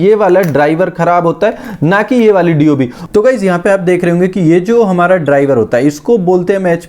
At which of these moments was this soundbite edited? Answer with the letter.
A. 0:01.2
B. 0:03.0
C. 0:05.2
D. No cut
B